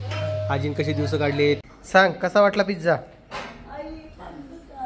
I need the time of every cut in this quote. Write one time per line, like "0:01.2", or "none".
0:01.6